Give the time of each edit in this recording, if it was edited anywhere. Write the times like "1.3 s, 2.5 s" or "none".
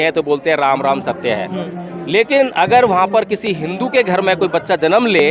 none